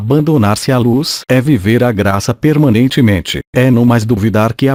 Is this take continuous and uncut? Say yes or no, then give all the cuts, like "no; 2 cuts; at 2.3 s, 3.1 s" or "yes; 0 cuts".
yes; 0 cuts